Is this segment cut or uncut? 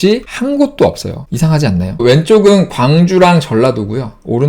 cut